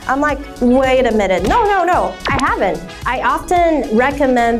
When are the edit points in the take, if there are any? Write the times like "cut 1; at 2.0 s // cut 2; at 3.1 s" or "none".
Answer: cut 1; at 2.9 s

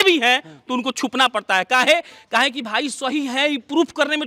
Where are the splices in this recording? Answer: none

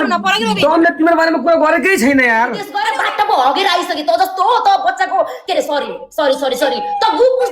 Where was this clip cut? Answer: cut 1; at 2.7 s

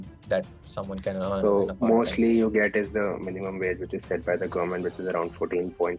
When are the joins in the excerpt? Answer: none

